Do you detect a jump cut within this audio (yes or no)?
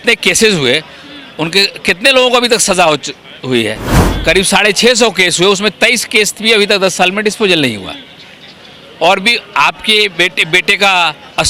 no